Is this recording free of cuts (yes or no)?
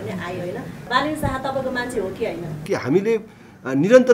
no